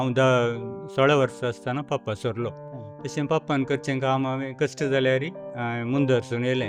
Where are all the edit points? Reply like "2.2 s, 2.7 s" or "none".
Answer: none